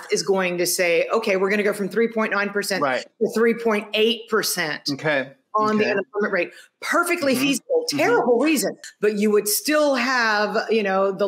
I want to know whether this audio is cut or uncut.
cut